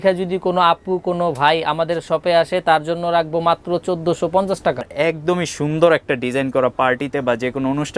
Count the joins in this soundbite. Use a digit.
1